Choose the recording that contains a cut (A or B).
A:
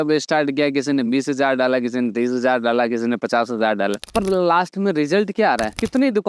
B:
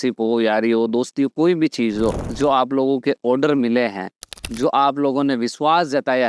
B